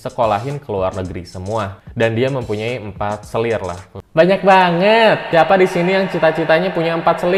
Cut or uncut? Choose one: uncut